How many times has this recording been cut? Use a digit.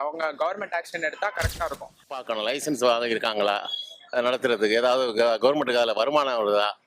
1